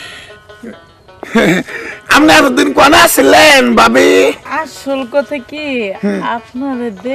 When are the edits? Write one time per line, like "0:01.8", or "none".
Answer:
0:04.4